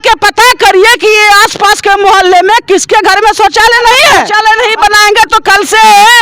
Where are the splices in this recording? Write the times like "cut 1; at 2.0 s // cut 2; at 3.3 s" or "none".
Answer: cut 1; at 4.3 s